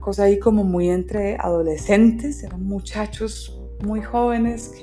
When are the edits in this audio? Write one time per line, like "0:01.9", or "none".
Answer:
0:02.4